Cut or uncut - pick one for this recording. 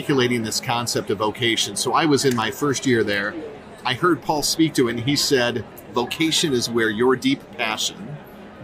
cut